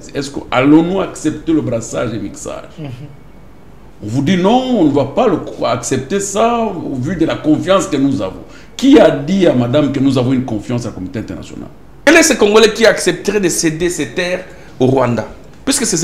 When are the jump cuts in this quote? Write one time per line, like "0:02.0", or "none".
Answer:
0:12.0